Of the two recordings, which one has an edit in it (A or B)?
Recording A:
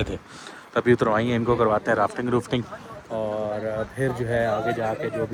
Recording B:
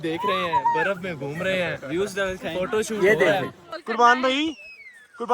B